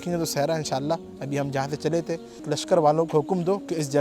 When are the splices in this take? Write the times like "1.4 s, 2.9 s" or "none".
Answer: 2.4 s